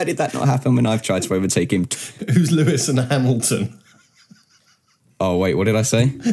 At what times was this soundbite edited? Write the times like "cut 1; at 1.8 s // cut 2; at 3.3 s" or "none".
cut 1; at 1.9 s